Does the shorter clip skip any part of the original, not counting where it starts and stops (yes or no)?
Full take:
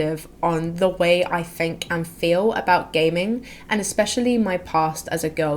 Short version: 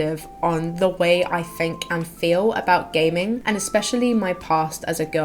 yes